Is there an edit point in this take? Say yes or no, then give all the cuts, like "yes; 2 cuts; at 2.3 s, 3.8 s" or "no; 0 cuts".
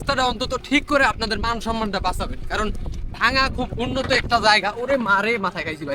no; 0 cuts